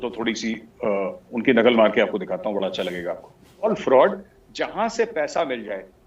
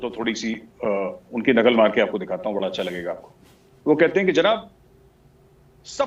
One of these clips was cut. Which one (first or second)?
first